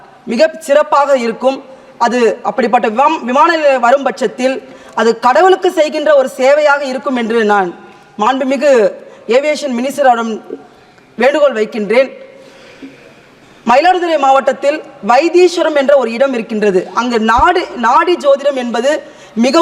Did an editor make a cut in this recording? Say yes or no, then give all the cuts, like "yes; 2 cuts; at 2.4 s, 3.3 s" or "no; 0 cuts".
no; 0 cuts